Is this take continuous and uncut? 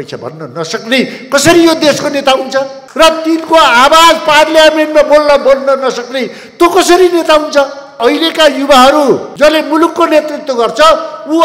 no; 2 cuts; at 8.0 s, 9.3 s

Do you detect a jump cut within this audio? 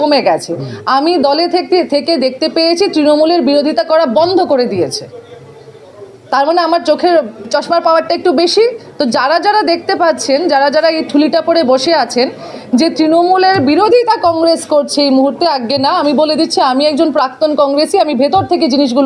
no; 0 cuts

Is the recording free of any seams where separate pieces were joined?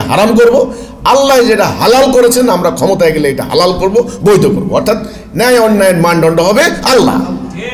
yes; 0 cuts

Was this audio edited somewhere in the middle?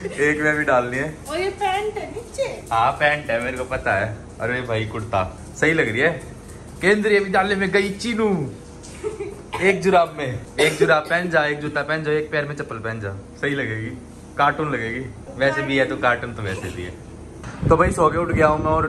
no; 0 cuts

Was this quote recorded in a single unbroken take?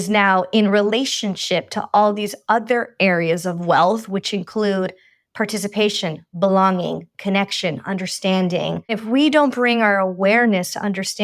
no; 1 cut; at 9.0 s

